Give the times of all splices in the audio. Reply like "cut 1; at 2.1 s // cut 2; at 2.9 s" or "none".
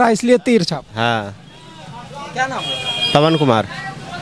none